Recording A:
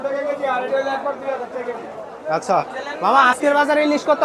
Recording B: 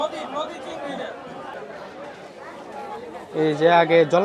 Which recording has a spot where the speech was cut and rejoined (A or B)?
B